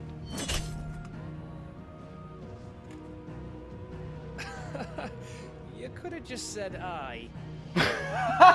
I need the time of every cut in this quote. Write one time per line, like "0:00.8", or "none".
none